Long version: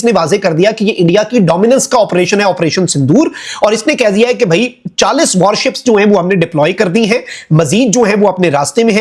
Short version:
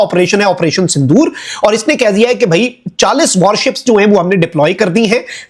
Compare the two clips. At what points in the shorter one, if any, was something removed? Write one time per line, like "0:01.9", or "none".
none